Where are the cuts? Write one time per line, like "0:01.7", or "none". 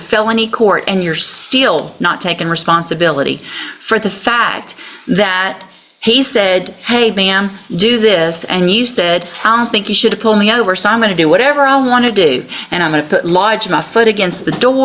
none

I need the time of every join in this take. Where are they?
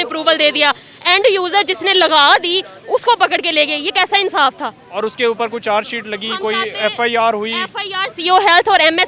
none

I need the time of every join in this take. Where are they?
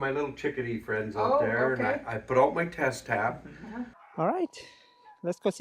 0:04.0

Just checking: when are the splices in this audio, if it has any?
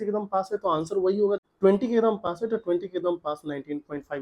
0:01.4

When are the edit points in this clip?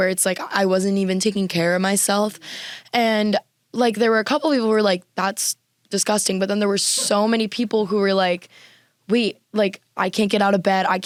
none

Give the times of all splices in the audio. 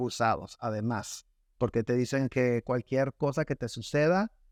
none

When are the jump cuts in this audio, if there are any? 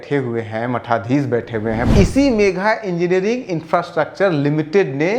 0:01.9

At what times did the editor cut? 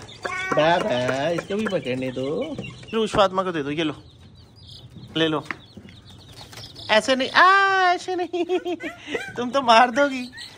0:02.9

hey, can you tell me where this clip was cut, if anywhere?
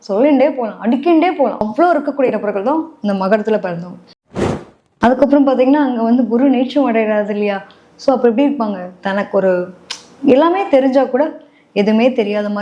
0:04.4

